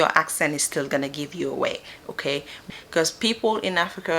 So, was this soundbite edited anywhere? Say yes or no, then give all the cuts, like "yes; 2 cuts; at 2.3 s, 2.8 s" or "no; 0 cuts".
yes; 1 cut; at 2.7 s